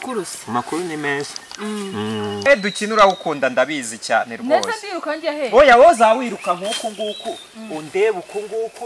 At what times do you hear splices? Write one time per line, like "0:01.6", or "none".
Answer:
0:02.5